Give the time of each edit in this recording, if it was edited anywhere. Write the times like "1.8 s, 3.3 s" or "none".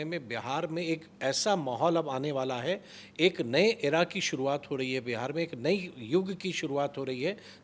none